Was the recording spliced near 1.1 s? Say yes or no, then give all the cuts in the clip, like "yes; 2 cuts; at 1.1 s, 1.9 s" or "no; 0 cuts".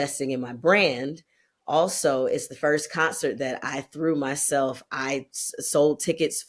no; 0 cuts